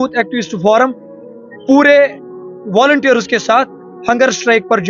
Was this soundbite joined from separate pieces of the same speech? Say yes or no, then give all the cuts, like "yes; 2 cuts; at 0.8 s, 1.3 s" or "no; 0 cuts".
no; 0 cuts